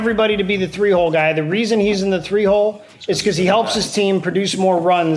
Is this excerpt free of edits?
yes; 0 cuts

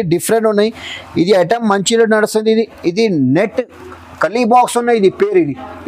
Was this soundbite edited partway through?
no; 0 cuts

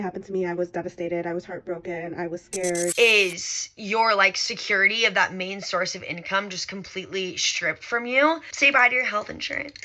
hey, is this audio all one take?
no; 1 cut; at 2.9 s

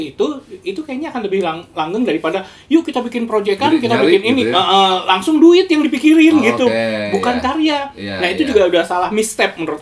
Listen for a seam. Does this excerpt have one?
no; 0 cuts

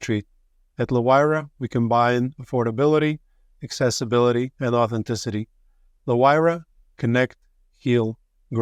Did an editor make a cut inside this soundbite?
no; 0 cuts

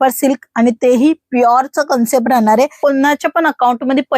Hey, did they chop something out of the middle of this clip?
yes; 1 cut; at 2.8 s

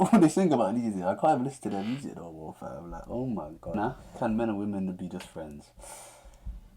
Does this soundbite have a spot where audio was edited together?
yes; 1 cut; at 4.1 s

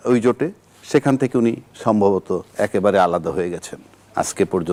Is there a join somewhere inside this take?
no; 0 cuts

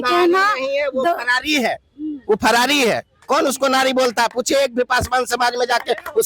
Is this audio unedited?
yes; 0 cuts

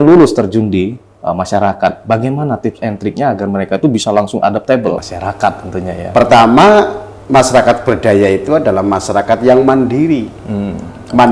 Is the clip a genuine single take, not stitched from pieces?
no; 1 cut; at 5.1 s

